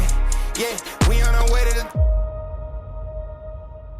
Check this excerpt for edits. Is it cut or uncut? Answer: cut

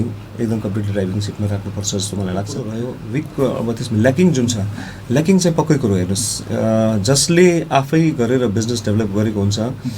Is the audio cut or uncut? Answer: cut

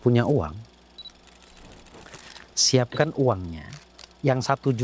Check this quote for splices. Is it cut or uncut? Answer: uncut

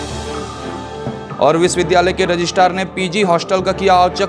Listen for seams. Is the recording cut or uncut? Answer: cut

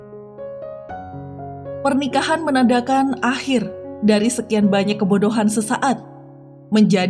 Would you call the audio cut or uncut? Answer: cut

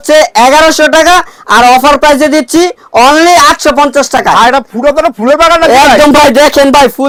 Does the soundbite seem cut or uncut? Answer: uncut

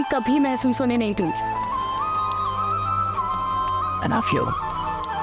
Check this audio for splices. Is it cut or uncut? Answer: uncut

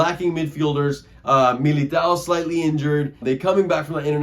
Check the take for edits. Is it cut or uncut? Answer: cut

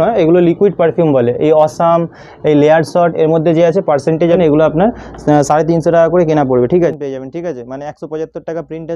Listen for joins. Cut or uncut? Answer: cut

